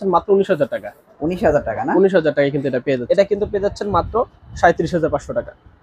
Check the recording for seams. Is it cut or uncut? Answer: cut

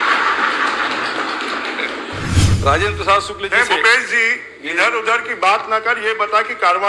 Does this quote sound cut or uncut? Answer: cut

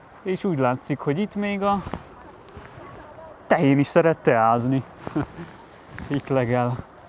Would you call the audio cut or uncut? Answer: uncut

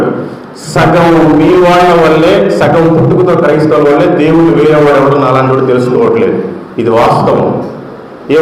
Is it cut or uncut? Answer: uncut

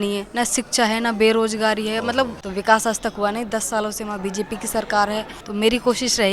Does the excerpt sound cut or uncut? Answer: cut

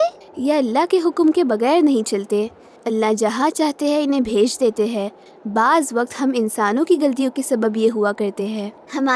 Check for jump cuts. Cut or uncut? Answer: uncut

